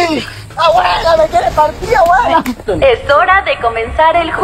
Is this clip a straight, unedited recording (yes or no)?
no